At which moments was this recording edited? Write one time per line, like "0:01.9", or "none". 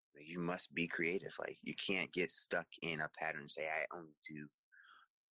none